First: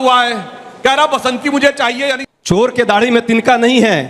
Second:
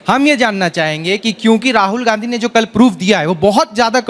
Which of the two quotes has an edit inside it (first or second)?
first